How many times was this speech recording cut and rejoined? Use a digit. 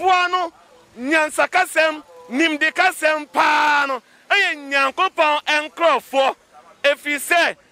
0